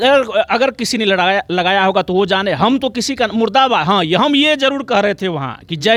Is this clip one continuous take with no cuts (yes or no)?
yes